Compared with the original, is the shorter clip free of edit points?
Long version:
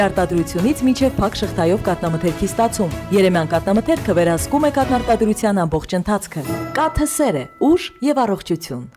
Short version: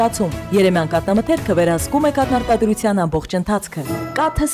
yes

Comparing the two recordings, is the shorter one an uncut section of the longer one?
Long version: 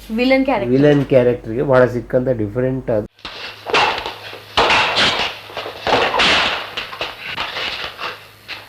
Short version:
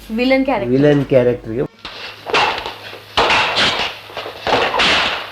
no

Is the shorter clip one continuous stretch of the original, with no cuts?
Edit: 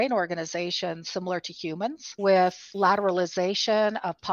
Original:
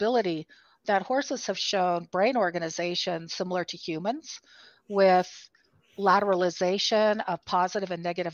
no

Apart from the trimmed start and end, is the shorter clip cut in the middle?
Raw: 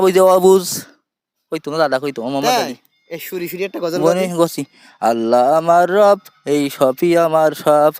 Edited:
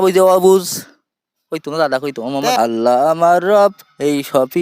yes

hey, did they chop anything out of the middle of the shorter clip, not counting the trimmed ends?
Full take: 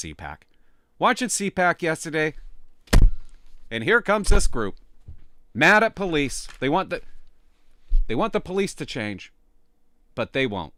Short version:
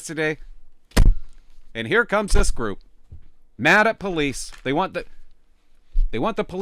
no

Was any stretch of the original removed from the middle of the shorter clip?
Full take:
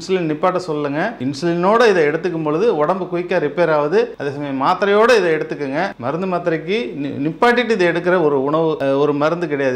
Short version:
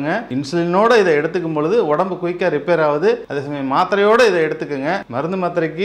no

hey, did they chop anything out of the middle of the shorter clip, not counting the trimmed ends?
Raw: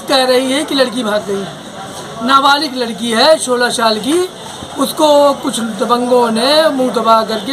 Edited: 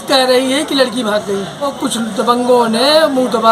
yes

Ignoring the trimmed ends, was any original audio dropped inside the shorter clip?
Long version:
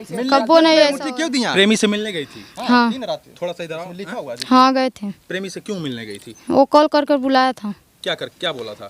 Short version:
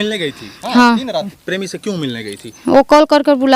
yes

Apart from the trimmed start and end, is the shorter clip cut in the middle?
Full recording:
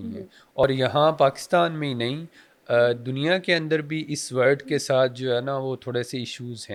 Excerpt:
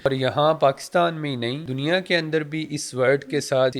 yes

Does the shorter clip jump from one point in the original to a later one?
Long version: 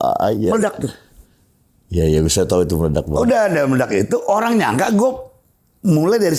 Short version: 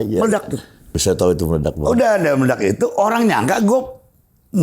yes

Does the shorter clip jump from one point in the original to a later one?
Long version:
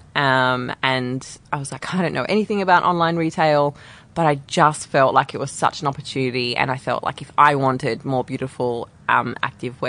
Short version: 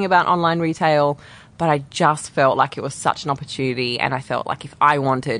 no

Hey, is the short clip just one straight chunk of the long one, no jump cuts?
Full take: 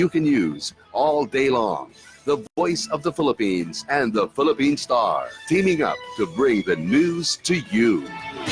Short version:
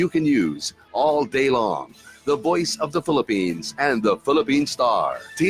no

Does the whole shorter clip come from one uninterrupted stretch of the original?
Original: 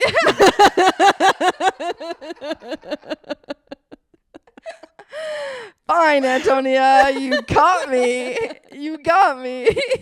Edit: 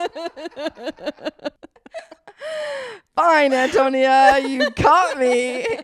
no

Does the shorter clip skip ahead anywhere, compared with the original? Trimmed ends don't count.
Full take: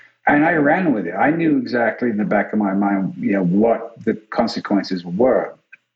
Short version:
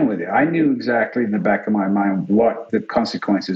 yes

